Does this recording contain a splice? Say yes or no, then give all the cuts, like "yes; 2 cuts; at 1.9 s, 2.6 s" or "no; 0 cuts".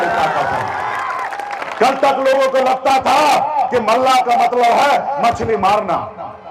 yes; 1 cut; at 1.6 s